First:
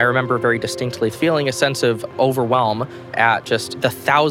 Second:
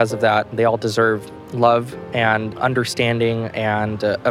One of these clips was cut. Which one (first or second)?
first